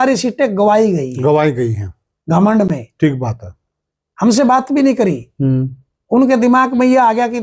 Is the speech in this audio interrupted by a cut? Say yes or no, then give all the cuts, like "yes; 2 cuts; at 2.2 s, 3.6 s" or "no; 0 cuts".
no; 0 cuts